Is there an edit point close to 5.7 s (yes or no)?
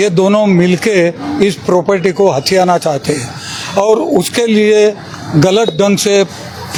no